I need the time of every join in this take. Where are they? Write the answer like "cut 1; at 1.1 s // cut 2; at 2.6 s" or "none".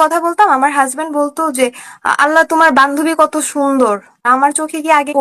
none